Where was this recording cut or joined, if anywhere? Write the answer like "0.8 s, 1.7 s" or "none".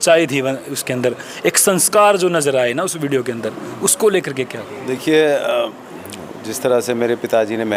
none